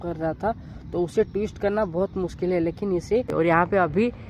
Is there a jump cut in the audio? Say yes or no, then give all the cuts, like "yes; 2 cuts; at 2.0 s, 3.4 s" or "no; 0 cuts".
yes; 1 cut; at 3.3 s